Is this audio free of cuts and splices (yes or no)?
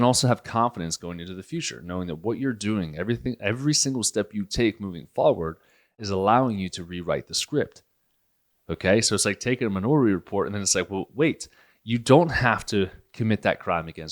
no